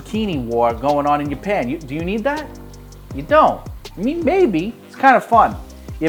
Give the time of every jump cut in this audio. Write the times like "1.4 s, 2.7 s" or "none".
none

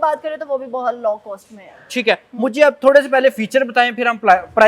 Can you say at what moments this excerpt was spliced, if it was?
none

